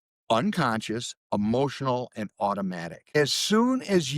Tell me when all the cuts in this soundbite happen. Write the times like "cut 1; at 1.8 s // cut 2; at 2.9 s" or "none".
cut 1; at 3.0 s